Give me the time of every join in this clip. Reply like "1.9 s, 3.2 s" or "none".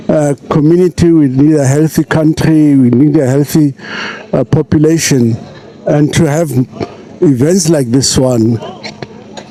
none